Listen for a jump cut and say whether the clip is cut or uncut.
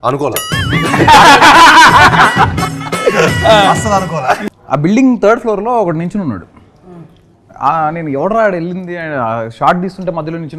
cut